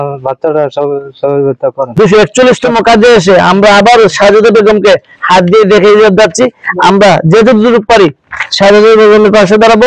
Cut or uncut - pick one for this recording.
cut